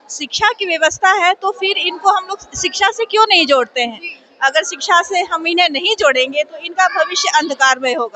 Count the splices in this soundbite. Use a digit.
0